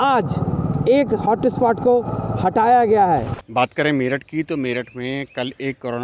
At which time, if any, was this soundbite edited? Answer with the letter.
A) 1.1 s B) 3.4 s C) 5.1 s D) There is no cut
B